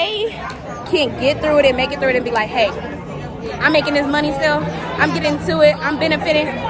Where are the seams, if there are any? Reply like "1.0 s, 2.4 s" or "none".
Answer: none